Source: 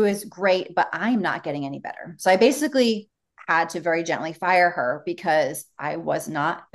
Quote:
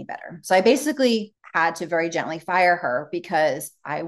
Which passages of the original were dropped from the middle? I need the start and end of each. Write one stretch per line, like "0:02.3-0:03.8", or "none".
0:03.1-0:03.3